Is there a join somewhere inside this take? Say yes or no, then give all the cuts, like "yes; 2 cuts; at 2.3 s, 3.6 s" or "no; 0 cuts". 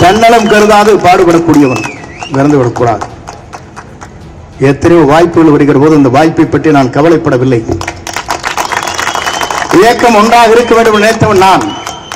no; 0 cuts